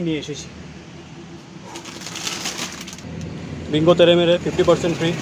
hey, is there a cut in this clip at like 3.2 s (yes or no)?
yes